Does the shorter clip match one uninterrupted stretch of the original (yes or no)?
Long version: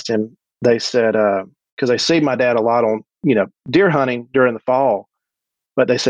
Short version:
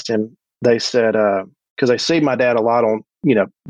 yes